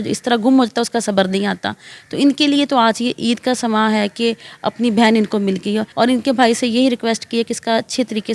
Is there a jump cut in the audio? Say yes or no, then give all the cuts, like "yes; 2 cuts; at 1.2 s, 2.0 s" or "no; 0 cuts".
yes; 1 cut; at 5.9 s